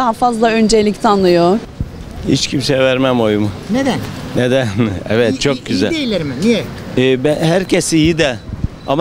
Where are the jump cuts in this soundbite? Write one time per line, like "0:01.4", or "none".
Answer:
0:01.7